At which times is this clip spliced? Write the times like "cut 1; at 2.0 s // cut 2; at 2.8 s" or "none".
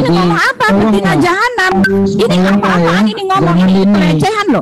none